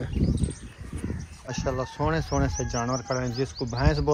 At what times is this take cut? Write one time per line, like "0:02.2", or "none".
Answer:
0:01.6